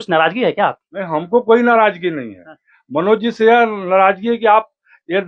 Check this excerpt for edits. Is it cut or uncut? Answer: uncut